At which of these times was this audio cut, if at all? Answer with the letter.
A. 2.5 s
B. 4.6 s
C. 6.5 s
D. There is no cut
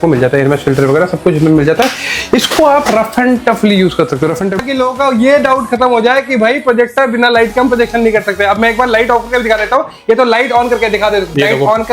B